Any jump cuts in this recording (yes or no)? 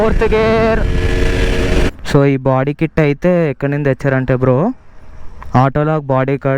yes